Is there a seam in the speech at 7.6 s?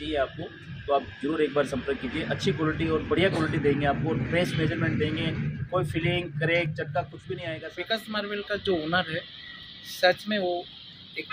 yes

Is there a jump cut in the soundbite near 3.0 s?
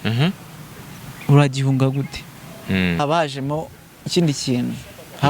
yes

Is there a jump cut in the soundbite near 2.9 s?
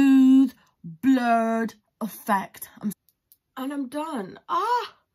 yes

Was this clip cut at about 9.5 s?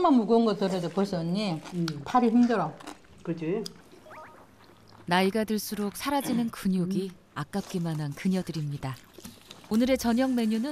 yes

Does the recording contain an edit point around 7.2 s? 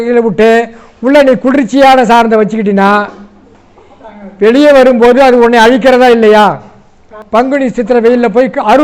yes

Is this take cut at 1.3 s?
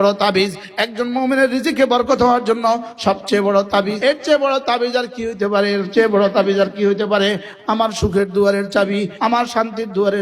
no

